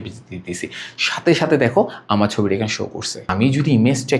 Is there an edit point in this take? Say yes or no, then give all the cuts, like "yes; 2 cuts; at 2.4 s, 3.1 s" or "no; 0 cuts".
yes; 1 cut; at 3.3 s